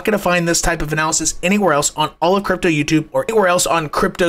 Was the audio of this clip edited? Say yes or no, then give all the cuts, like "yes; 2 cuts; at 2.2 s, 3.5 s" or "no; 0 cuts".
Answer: no; 0 cuts